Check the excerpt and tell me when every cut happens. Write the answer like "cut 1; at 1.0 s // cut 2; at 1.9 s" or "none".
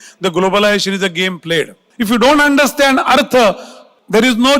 cut 1; at 1.9 s